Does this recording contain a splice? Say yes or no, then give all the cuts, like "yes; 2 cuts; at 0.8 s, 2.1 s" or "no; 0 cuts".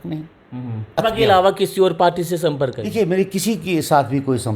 yes; 1 cut; at 1.0 s